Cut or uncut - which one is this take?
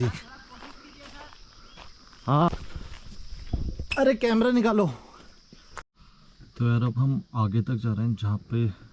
cut